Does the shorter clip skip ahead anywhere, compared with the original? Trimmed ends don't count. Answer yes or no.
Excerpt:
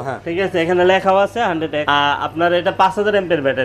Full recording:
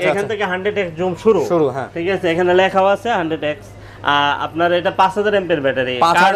yes